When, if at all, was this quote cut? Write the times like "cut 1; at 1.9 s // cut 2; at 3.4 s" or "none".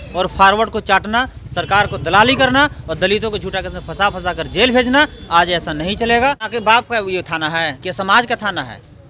cut 1; at 6.5 s